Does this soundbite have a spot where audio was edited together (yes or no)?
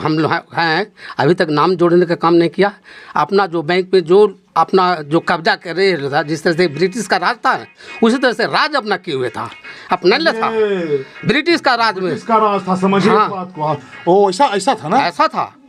no